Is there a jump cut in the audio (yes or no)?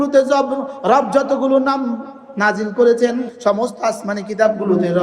yes